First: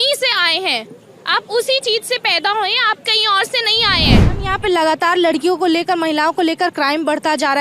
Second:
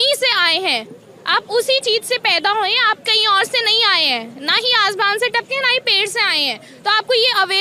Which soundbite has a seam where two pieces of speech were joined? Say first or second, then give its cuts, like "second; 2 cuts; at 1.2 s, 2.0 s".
first; 1 cut; at 4.2 s